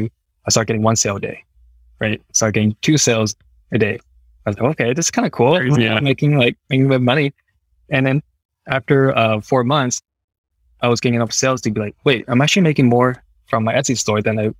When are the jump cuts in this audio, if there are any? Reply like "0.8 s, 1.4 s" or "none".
none